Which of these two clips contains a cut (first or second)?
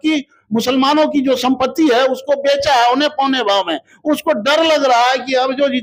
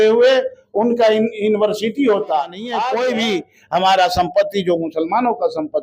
second